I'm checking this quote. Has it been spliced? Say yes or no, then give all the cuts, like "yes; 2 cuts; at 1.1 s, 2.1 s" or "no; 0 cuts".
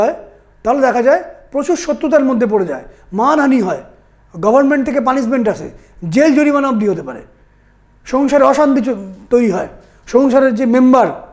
no; 0 cuts